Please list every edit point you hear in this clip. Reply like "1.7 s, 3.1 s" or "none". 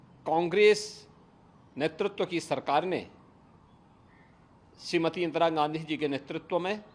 none